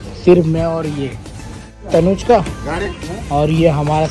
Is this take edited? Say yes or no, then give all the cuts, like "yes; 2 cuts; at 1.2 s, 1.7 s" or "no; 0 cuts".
yes; 1 cut; at 1.7 s